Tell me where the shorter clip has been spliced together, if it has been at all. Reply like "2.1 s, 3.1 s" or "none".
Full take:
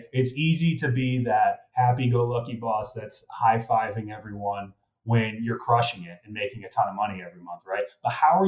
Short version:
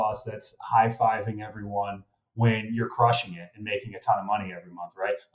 none